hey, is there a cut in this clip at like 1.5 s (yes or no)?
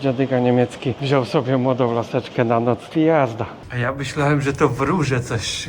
no